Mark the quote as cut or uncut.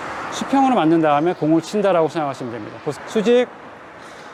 uncut